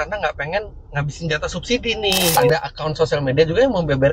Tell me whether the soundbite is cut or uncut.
cut